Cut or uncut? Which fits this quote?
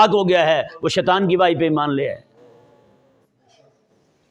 uncut